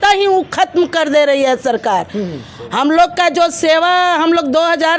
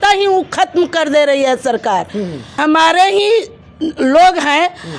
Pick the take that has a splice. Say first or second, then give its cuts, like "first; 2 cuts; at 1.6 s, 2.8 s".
second; 1 cut; at 2.6 s